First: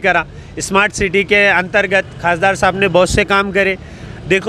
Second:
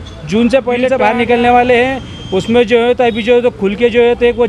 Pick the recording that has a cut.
second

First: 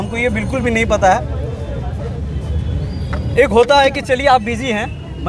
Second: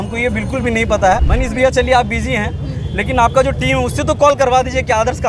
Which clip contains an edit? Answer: second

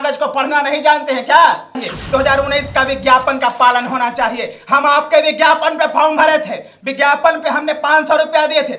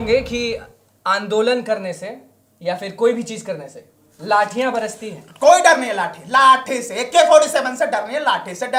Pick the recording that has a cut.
first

